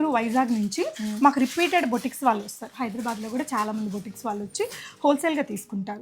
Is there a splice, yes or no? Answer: no